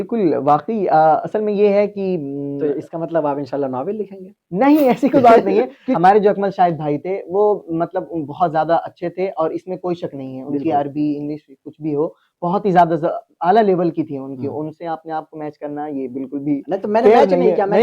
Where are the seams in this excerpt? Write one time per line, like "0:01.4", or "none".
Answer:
0:05.8